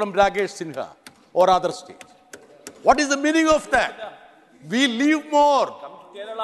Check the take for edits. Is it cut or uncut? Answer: uncut